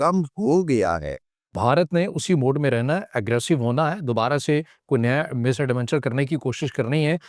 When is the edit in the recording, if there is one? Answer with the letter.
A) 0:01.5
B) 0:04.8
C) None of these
A